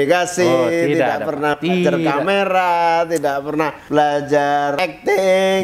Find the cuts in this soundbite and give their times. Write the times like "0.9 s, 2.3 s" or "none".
3.8 s, 4.8 s